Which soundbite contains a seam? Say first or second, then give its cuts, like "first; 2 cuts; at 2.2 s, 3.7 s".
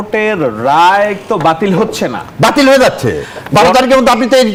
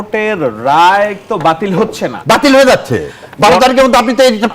second; 1 cut; at 2.1 s